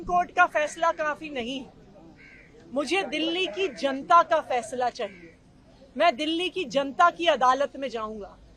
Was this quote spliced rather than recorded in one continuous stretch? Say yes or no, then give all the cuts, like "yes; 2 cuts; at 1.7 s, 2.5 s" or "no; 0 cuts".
no; 0 cuts